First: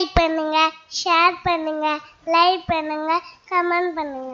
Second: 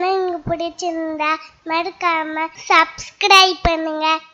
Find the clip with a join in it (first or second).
second